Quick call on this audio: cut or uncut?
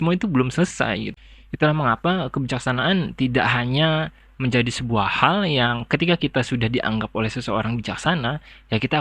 cut